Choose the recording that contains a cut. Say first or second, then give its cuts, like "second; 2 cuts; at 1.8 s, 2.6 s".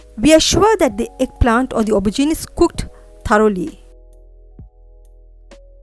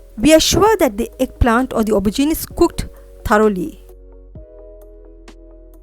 first; 1 cut; at 3.8 s